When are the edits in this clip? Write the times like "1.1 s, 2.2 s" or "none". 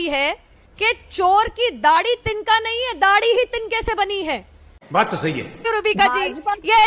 5.7 s